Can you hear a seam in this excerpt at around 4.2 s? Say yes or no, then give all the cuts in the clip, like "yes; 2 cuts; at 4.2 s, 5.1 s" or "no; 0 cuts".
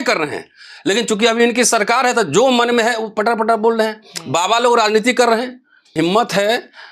no; 1 cut; at 5.9 s